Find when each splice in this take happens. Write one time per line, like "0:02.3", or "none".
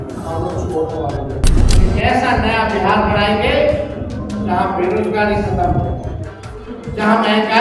0:01.6